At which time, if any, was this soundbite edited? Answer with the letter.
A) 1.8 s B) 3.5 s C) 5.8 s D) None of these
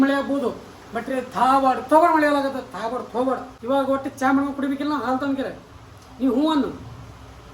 B